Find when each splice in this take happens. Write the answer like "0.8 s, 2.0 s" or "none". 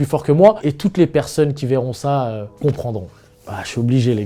2.5 s